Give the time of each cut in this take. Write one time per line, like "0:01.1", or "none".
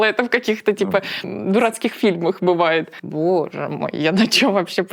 0:01.3
0:02.9

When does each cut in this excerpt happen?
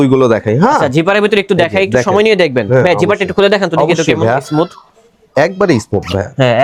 none

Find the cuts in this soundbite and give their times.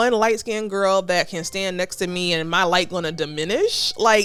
none

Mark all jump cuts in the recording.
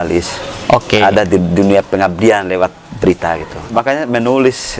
0:03.7

